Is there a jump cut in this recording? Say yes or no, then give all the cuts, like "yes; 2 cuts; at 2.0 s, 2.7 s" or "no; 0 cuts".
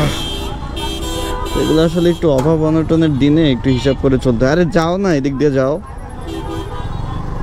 no; 0 cuts